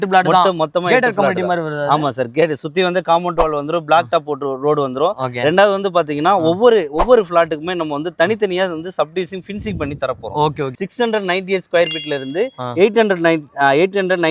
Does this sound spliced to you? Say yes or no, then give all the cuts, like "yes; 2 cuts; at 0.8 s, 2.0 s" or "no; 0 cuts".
yes; 1 cut; at 10.7 s